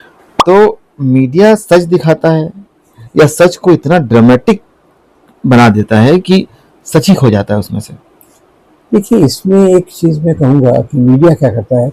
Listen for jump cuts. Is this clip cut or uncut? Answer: uncut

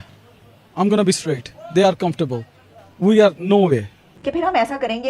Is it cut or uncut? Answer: cut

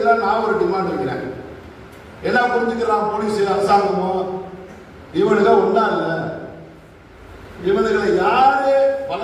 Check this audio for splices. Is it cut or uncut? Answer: uncut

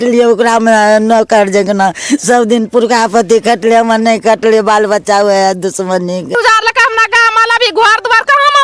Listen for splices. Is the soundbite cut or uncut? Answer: cut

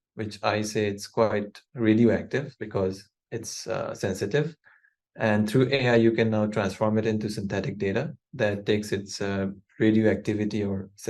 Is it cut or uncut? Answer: uncut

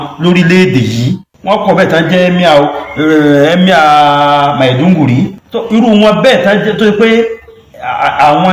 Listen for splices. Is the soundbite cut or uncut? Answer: cut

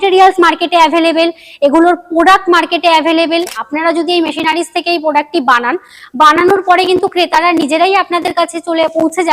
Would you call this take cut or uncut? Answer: cut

